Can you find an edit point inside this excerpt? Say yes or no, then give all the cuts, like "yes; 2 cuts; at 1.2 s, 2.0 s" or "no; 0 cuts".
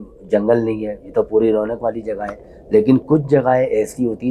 no; 0 cuts